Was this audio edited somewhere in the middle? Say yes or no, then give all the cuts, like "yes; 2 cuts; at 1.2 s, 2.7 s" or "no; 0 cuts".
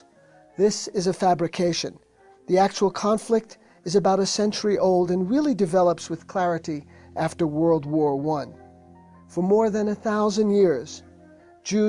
yes; 1 cut; at 1.0 s